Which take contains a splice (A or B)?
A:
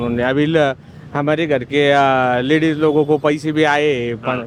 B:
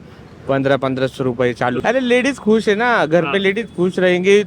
B